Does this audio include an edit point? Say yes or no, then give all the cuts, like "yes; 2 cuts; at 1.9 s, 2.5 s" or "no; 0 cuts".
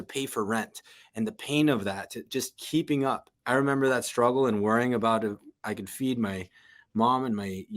yes; 1 cut; at 3.3 s